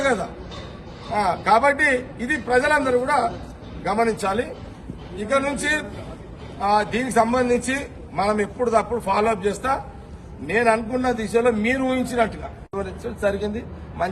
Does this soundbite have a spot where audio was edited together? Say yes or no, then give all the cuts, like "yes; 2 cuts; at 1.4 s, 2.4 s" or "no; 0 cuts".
yes; 1 cut; at 12.7 s